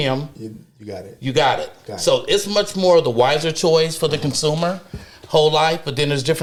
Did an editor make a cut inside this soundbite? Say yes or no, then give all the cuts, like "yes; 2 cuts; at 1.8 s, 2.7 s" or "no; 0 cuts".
no; 0 cuts